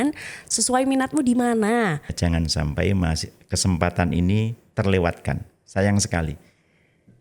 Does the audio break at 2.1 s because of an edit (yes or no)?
yes